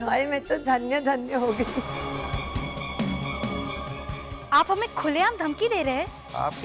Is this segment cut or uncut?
cut